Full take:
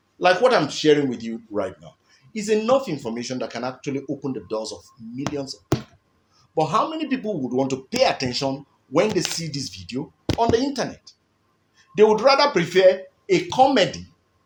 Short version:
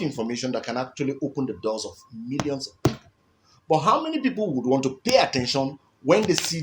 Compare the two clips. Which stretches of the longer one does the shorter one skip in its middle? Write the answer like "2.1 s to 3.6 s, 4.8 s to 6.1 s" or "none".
none